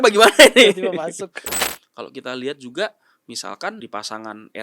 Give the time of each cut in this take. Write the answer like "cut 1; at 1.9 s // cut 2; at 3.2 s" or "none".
cut 1; at 1.5 s